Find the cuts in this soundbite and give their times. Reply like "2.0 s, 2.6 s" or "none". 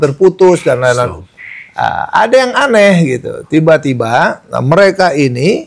1.2 s